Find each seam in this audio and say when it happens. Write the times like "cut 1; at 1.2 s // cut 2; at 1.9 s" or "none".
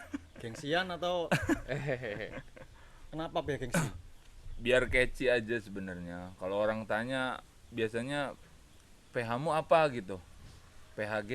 none